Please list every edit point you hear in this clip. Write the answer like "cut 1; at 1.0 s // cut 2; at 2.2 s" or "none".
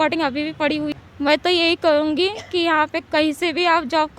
cut 1; at 0.9 s

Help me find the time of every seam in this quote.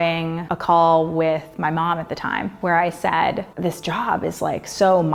none

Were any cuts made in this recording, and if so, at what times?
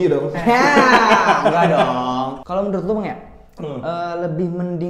cut 1; at 2.4 s

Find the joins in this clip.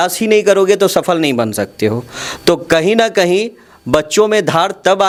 none

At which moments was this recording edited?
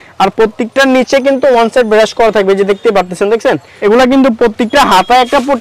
cut 1; at 3.7 s

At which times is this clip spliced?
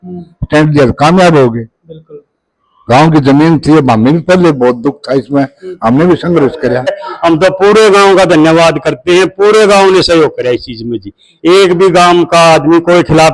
cut 1; at 7.0 s

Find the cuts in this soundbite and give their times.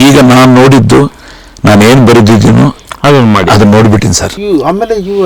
cut 1; at 4.4 s

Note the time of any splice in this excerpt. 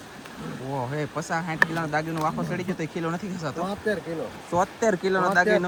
none

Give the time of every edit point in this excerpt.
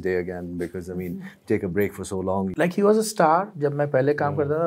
cut 1; at 2.5 s

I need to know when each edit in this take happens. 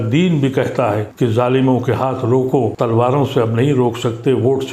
cut 1; at 1.1 s // cut 2; at 2.7 s

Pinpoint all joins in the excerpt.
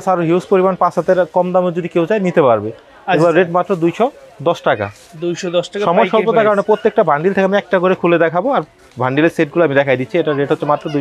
none

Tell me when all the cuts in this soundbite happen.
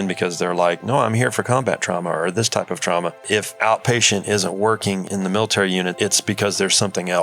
cut 1; at 3.2 s // cut 2; at 5.0 s // cut 3; at 5.9 s

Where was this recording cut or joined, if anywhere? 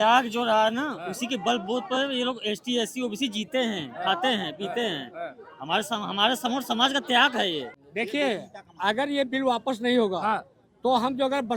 cut 1; at 7.8 s

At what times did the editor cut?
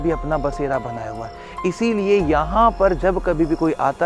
none

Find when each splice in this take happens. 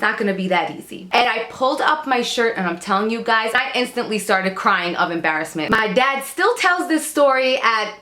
cut 1; at 1.2 s // cut 2; at 3.6 s // cut 3; at 5.7 s

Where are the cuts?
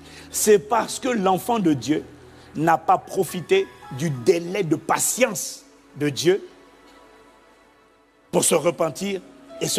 none

